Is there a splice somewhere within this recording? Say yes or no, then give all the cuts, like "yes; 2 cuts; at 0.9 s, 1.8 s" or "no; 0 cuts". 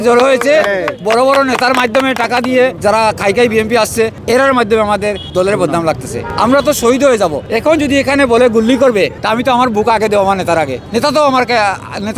yes; 7 cuts; at 2.8 s, 4.2 s, 5.2 s, 6.2 s, 7.5 s, 9.2 s, 10.8 s